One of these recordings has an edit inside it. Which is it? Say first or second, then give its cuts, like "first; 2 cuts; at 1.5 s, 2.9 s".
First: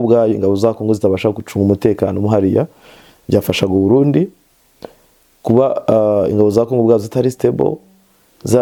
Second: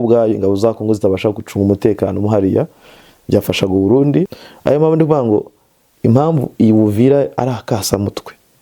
second; 1 cut; at 4.4 s